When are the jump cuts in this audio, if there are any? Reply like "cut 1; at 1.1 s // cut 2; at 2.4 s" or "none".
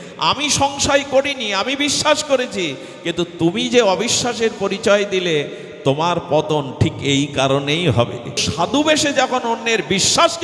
cut 1; at 8.5 s